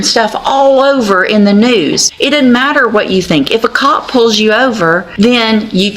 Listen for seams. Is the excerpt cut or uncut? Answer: cut